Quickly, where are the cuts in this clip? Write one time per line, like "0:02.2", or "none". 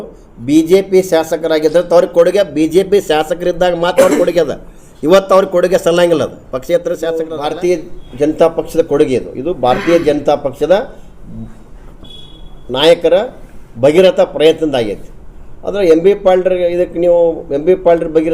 0:07.3